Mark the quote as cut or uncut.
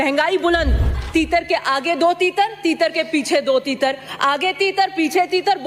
cut